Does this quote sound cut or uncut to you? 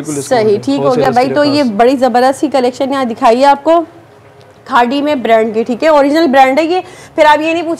uncut